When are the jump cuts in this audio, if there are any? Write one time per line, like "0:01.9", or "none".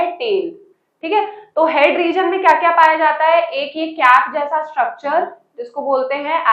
none